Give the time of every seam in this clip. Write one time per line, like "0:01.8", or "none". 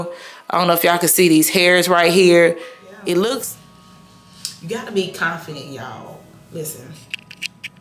0:03.5